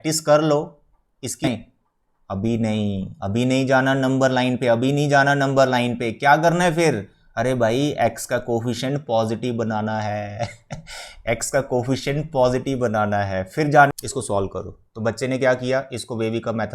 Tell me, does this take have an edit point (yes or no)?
yes